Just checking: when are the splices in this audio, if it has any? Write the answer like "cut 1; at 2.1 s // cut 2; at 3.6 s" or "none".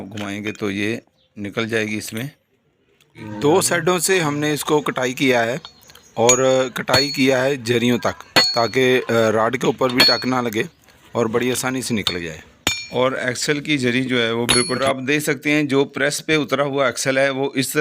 cut 1; at 3.2 s // cut 2; at 14.8 s